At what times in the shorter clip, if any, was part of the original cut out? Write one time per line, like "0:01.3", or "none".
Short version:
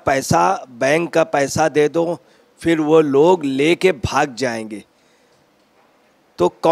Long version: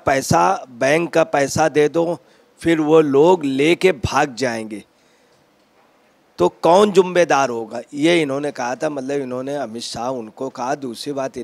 none